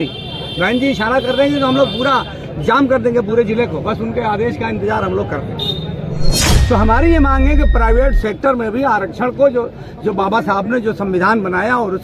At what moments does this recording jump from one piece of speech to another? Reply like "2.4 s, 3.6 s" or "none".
6.5 s